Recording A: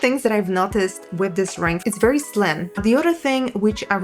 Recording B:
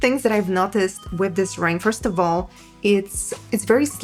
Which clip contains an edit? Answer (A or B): A